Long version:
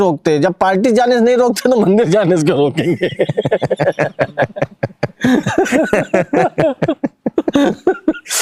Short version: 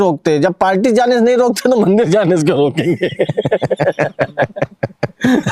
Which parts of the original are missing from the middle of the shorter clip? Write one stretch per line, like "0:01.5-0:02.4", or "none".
none